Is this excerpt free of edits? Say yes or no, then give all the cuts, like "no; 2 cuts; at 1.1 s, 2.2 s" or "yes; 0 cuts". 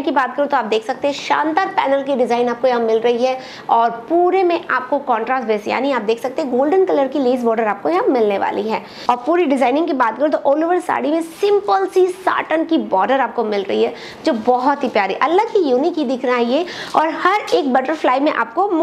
no; 1 cut; at 8.9 s